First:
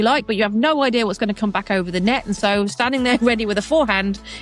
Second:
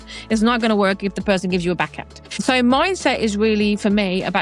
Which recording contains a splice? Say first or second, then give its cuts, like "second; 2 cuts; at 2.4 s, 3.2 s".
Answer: second; 1 cut; at 2.4 s